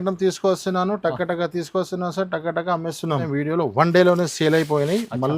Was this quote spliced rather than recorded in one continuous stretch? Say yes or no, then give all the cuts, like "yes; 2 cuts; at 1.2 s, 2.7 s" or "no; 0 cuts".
yes; 1 cut; at 3.3 s